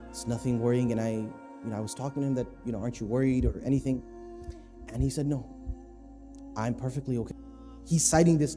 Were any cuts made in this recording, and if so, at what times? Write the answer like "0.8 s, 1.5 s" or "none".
7.3 s